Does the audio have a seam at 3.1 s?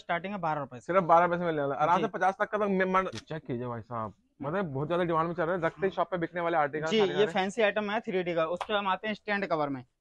yes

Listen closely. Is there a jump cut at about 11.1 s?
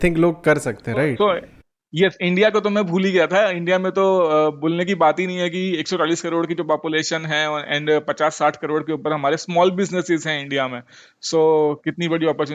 no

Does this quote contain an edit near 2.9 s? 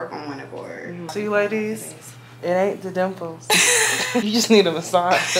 no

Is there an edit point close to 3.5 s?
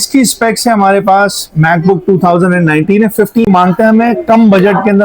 yes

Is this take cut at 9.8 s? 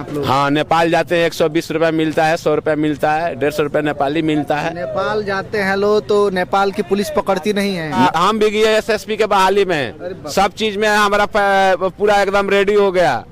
no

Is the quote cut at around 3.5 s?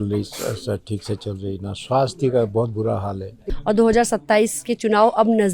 yes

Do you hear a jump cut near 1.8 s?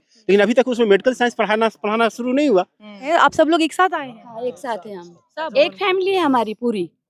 no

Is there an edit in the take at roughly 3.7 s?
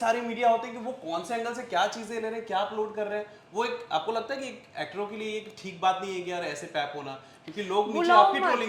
no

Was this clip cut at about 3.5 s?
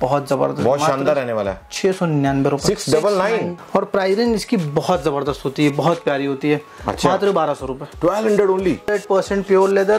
yes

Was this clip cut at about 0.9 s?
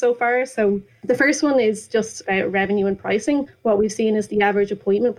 yes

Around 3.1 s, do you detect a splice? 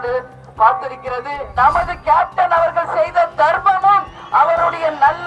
no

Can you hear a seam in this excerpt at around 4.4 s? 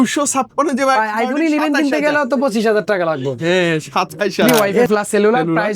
yes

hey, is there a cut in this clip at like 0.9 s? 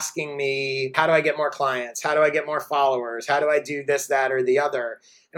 yes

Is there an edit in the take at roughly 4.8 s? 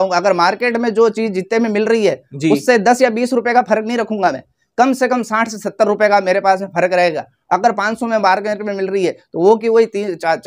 no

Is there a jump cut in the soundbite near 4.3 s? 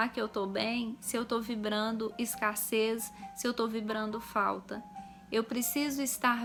no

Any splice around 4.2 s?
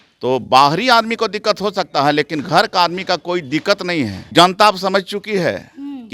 yes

